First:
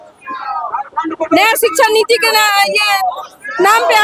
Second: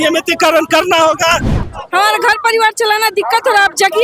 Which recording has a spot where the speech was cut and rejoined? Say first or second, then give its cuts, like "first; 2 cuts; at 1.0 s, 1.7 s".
second; 1 cut; at 1.5 s